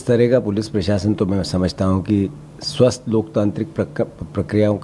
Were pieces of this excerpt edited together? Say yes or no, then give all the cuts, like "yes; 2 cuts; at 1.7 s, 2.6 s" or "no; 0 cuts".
no; 0 cuts